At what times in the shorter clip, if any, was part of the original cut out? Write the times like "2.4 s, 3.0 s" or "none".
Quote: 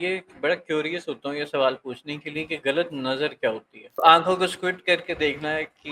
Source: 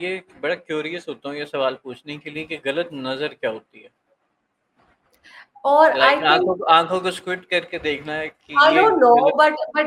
4.0 s